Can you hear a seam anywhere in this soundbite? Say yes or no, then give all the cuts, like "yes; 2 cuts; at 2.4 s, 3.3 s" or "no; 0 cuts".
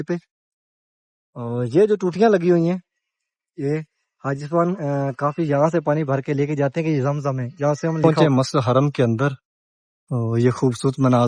yes; 1 cut; at 8.0 s